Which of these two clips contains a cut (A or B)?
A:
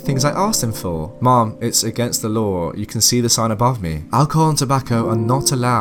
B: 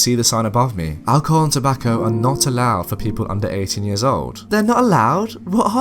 B